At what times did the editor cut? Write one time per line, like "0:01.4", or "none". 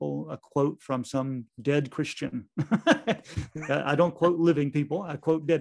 0:01.5